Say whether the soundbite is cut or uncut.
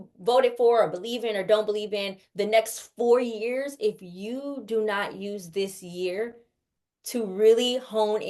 uncut